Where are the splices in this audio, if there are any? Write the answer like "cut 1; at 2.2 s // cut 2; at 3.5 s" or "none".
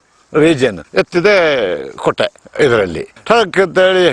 cut 1; at 0.8 s // cut 2; at 3.1 s